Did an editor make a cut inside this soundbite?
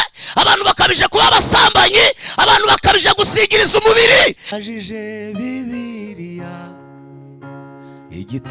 yes; 1 cut; at 4.5 s

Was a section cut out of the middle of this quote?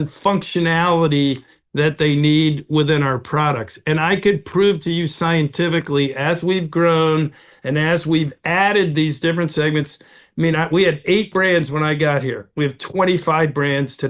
no; 0 cuts

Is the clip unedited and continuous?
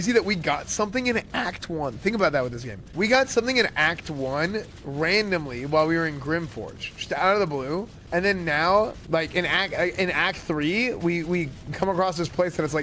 yes; 0 cuts

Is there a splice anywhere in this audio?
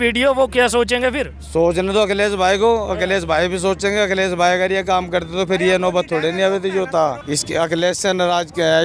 yes; 1 cut; at 7.2 s

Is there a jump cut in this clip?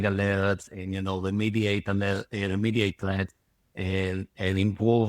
no; 0 cuts

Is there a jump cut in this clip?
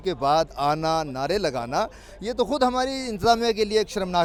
no; 0 cuts

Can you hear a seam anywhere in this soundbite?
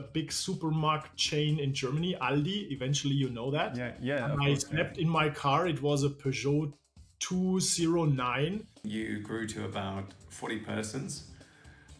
yes; 1 cut; at 8.9 s

